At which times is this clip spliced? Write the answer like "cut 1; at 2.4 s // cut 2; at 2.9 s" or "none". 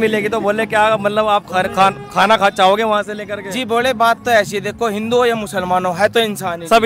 none